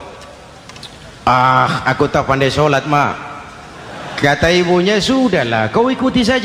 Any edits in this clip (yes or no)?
yes